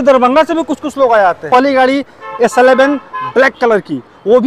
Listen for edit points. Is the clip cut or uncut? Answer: cut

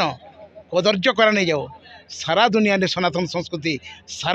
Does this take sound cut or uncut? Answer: uncut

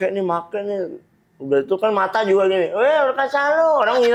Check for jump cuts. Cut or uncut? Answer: uncut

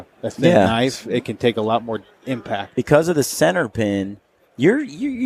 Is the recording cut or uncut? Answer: cut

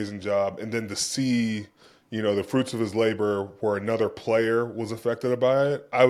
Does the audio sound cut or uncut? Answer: uncut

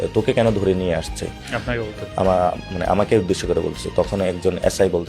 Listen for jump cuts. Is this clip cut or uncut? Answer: uncut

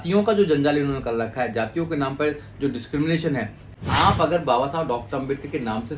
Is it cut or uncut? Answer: cut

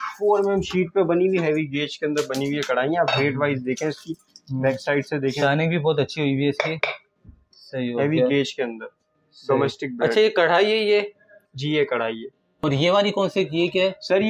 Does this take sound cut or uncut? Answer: cut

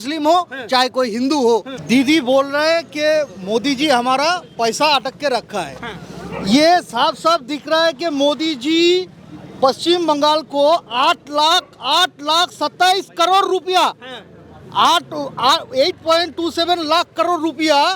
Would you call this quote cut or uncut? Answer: cut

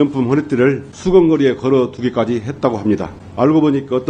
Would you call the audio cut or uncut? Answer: cut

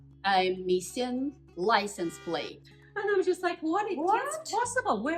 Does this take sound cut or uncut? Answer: uncut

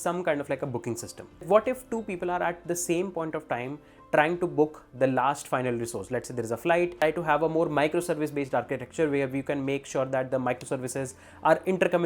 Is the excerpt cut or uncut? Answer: cut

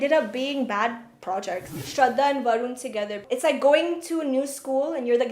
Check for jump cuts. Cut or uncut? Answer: cut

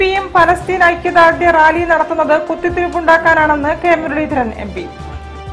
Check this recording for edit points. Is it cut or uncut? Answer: uncut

